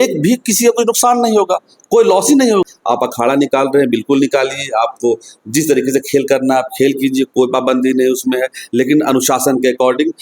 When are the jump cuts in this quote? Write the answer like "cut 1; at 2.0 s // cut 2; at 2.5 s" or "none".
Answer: cut 1; at 2.7 s

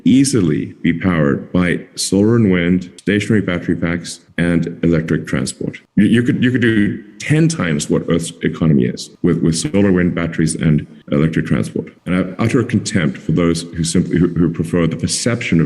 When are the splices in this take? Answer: cut 1; at 5.8 s // cut 2; at 11.9 s

